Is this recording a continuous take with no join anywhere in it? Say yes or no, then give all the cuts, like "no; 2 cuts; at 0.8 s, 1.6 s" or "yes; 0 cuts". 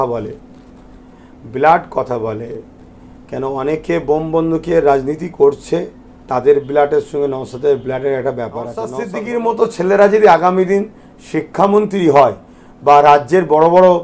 no; 1 cut; at 9.0 s